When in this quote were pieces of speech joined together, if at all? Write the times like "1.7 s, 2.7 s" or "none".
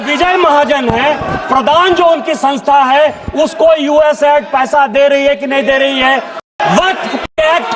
6.4 s